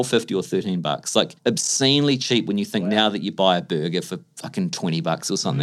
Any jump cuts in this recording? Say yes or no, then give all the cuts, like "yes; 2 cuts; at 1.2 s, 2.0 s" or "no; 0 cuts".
yes; 1 cut; at 1.3 s